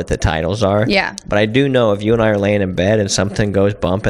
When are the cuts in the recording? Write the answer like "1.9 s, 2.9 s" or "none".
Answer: none